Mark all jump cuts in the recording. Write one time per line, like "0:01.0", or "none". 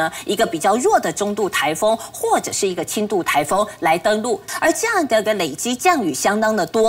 0:04.5